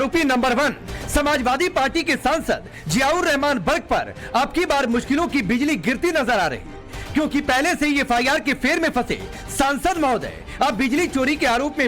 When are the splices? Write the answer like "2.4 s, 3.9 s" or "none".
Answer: 8.0 s